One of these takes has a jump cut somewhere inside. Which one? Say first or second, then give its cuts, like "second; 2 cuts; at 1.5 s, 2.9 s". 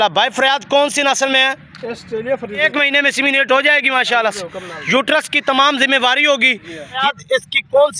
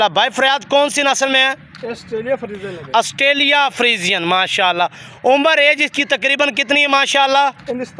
first; 2 cuts; at 2.6 s, 7.0 s